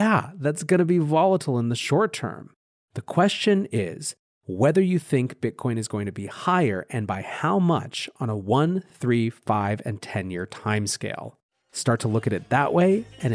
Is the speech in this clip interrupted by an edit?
no; 0 cuts

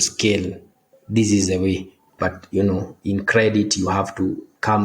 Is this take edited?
yes; 1 cut; at 2.1 s

